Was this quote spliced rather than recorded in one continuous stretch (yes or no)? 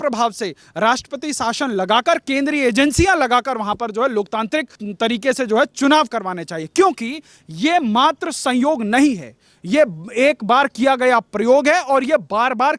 yes